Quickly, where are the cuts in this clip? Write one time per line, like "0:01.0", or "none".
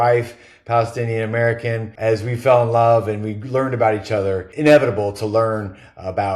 0:01.9
0:04.5